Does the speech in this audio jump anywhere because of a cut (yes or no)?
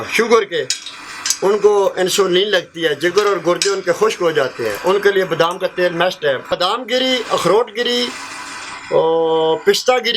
yes